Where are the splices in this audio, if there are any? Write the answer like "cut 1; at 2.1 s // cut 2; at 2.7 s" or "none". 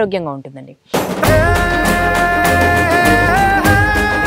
none